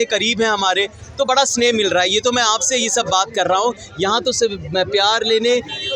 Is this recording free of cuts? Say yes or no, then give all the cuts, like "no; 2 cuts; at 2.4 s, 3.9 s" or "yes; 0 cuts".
yes; 0 cuts